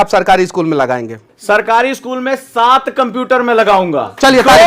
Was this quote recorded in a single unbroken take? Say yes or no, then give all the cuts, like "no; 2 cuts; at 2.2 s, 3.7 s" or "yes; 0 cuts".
no; 1 cut; at 1.3 s